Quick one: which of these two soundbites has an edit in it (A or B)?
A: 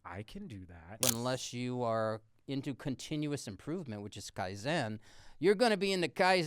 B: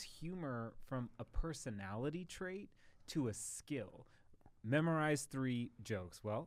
A